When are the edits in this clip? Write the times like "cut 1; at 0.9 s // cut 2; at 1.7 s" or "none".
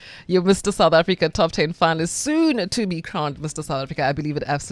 none